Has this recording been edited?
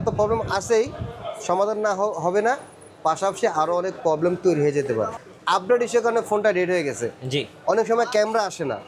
yes; 1 cut; at 5.2 s

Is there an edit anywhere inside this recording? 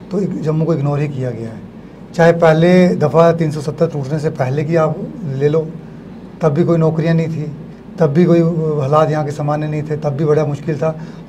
no; 0 cuts

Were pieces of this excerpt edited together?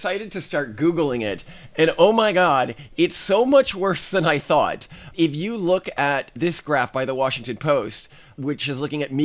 no; 0 cuts

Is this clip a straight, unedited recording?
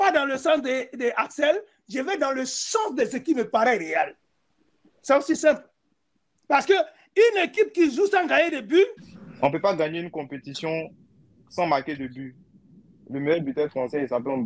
no; 1 cut; at 9.1 s

